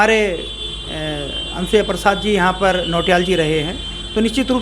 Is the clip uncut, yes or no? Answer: yes